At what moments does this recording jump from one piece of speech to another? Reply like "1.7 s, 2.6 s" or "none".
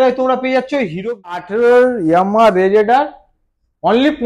1.4 s